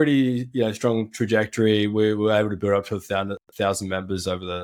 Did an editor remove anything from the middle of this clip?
no; 0 cuts

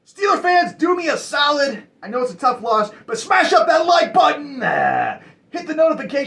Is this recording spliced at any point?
no; 0 cuts

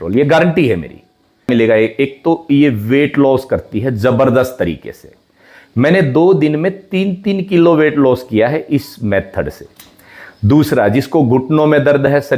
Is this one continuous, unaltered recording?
no; 1 cut; at 1.5 s

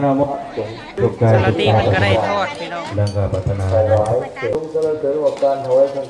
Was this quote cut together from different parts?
yes; 2 cuts; at 0.9 s, 4.5 s

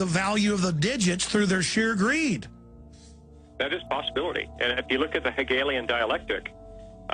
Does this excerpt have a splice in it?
yes; 1 cut; at 3.9 s

